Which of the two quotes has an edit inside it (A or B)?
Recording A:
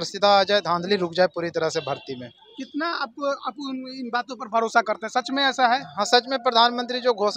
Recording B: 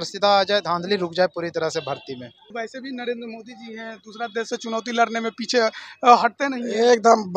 B